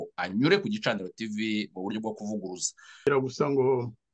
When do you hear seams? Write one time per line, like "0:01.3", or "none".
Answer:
0:03.0

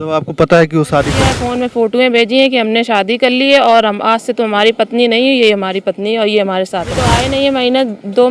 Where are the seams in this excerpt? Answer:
0:01.4
0:07.2

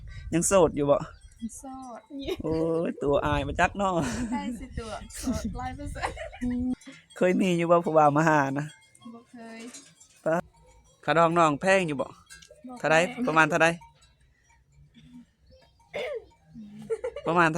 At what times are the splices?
0:06.7
0:10.4

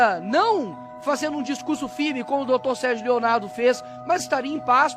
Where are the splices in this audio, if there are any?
none

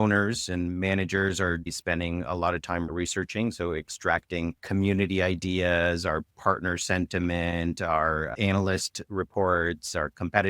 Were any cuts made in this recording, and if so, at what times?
0:01.7

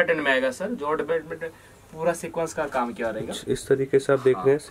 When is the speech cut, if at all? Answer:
none

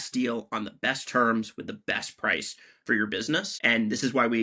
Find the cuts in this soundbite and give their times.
0:03.5

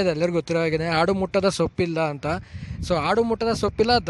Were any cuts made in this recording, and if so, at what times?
none

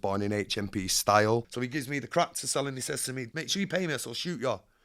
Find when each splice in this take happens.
0:01.5
0:03.2

